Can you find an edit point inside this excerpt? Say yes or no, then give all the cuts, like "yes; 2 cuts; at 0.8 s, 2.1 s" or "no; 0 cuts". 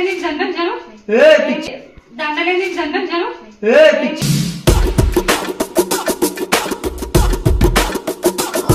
no; 0 cuts